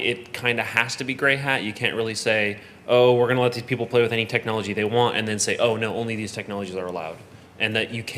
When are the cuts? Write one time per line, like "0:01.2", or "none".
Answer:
0:04.5